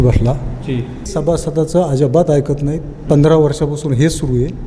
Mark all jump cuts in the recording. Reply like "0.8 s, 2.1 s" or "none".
1.1 s